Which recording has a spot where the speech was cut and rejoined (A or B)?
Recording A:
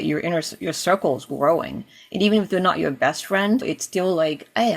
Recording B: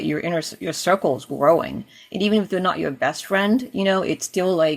A